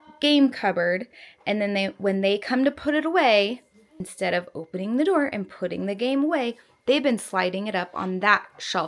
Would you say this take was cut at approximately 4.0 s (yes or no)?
yes